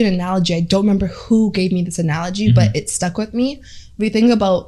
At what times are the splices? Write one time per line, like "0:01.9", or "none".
none

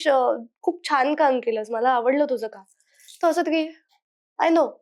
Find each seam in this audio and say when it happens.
none

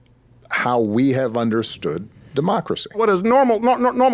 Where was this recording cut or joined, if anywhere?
0:03.0

